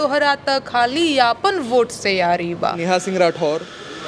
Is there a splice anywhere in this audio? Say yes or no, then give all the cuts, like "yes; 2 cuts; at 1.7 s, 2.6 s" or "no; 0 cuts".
yes; 1 cut; at 2.8 s